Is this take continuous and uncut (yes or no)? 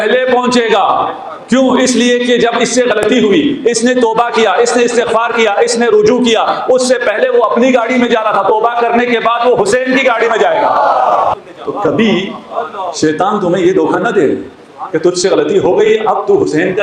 yes